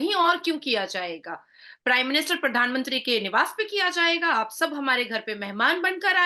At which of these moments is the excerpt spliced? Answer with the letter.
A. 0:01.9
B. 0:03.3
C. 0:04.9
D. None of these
D